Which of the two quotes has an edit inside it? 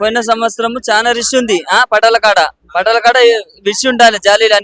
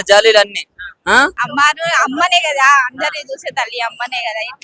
second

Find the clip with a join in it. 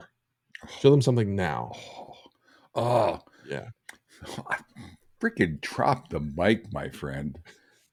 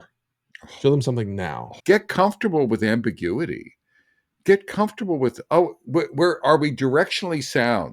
second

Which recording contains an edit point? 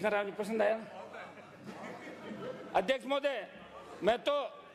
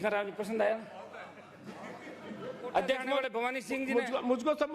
second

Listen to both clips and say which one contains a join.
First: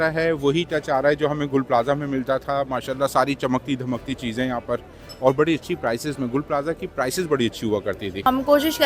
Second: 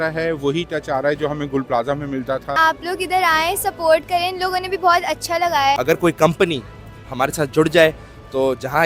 second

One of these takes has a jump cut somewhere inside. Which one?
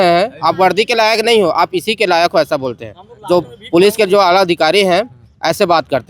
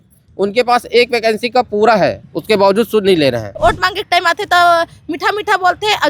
second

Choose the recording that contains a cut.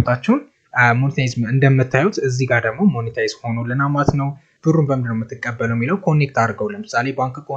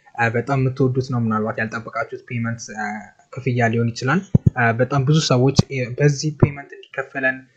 first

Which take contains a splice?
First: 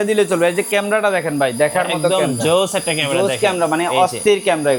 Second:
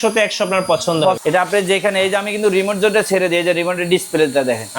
second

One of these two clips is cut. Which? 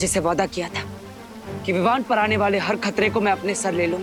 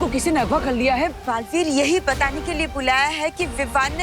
second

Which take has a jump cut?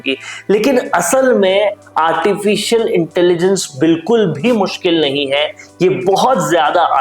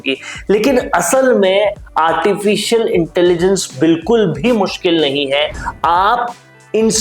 second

